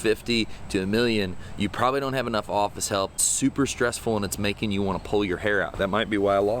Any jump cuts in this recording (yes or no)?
yes